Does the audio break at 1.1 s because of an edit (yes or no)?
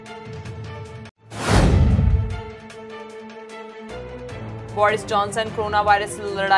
yes